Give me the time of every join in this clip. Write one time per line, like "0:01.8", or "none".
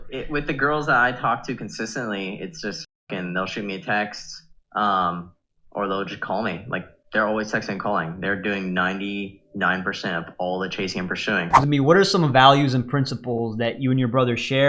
0:11.6